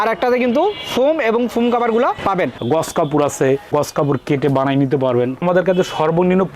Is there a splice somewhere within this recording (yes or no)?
yes